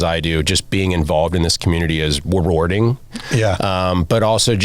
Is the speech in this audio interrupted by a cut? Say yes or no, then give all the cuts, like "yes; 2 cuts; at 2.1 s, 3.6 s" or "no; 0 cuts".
yes; 1 cut; at 3.2 s